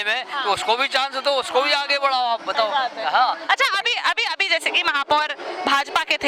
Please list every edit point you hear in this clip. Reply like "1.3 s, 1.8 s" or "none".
none

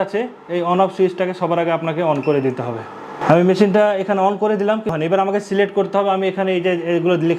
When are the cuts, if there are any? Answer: 3.2 s, 4.9 s

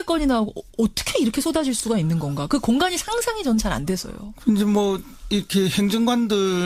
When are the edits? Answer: 4.1 s

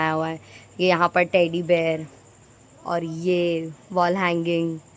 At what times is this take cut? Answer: none

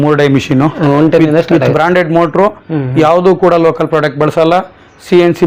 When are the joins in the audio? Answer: none

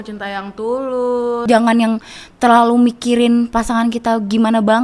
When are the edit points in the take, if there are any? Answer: 1.4 s

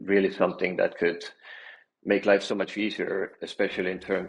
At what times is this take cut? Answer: none

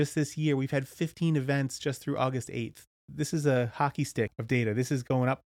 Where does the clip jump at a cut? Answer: 3.1 s, 4.4 s

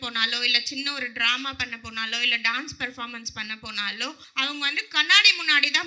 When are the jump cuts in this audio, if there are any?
none

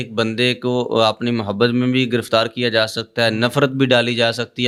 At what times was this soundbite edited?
none

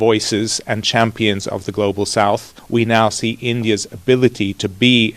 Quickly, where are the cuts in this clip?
2.5 s

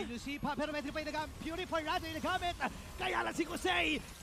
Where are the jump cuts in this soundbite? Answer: none

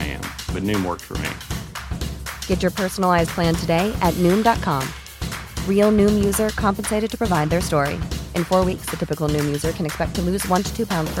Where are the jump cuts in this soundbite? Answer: none

